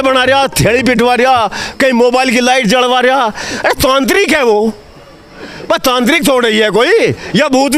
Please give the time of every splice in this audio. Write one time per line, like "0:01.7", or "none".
none